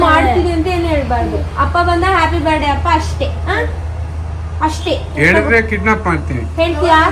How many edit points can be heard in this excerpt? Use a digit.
0